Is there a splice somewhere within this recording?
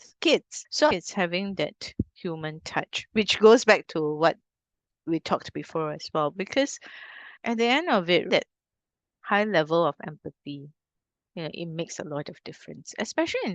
yes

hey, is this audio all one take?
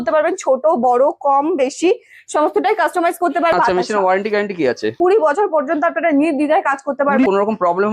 no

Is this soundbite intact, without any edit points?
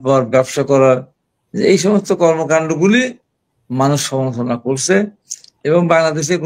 yes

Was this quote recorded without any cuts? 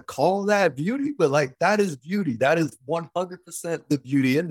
yes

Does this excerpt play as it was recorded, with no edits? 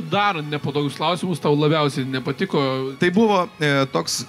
no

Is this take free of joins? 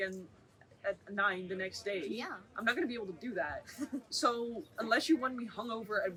yes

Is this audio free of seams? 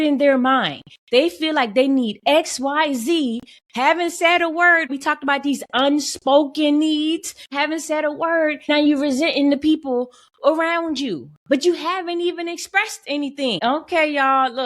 no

